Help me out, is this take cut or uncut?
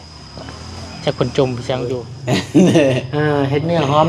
cut